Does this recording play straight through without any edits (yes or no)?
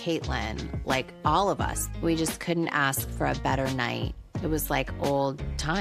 yes